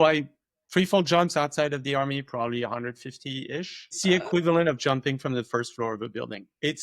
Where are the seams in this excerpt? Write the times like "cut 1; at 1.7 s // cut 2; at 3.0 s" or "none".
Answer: cut 1; at 3.9 s